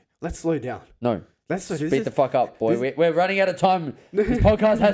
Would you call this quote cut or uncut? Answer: uncut